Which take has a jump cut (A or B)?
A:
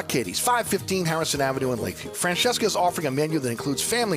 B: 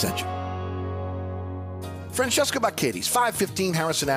B